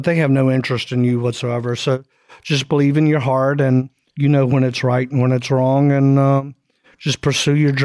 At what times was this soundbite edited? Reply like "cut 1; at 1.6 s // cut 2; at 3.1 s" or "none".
cut 1; at 4.0 s